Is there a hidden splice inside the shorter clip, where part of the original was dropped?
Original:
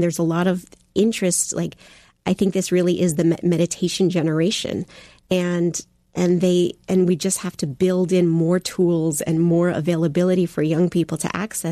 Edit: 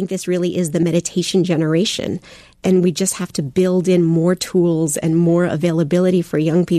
yes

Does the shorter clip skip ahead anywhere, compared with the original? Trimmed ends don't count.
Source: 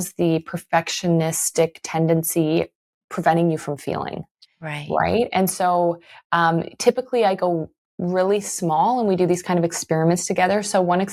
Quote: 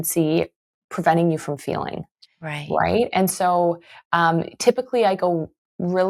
no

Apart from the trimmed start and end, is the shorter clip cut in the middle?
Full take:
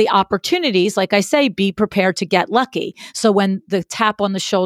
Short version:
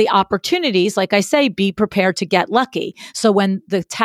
no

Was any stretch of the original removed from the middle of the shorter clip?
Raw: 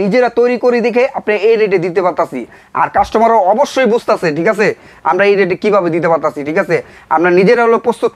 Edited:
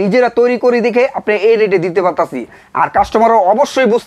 no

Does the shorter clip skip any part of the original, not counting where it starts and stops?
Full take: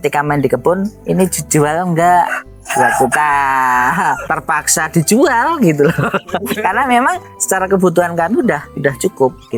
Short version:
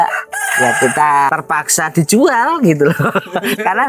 yes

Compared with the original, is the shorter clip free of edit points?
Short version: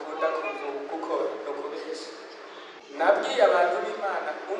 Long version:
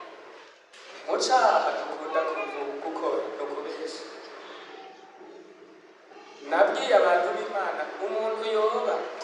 no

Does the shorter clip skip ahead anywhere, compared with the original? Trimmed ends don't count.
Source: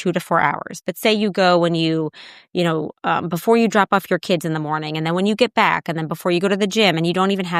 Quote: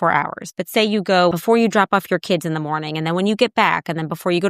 yes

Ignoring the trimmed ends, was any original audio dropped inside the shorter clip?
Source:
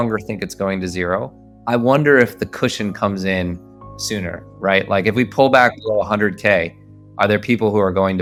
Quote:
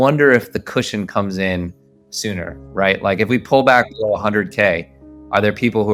no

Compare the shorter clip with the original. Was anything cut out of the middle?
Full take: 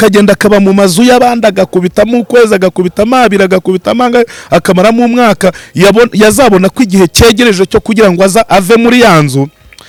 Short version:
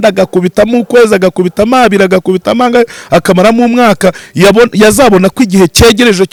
no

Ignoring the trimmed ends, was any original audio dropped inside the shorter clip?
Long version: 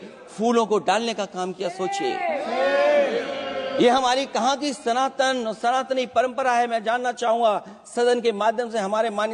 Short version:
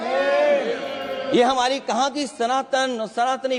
no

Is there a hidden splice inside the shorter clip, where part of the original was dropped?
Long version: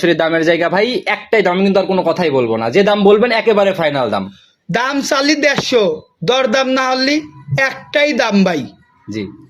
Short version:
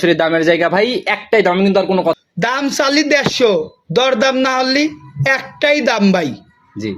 yes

